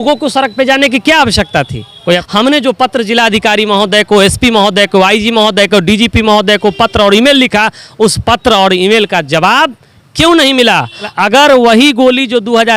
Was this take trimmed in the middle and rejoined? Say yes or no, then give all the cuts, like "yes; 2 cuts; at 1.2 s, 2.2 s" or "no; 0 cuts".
yes; 2 cuts; at 2.2 s, 11.1 s